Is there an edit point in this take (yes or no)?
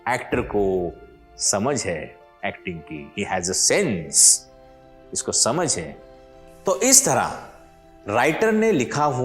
no